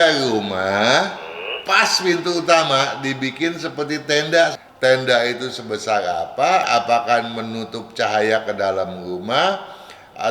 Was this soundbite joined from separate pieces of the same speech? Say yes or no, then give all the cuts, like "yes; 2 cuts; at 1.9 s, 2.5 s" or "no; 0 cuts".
yes; 2 cuts; at 4.5 s, 6.6 s